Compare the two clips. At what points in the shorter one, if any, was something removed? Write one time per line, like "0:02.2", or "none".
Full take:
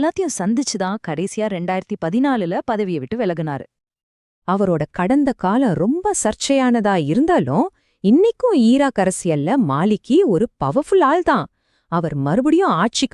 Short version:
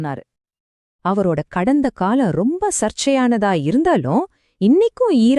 none